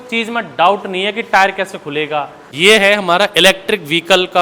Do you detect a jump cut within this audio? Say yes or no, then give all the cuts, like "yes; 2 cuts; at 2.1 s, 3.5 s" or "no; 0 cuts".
yes; 1 cut; at 2.4 s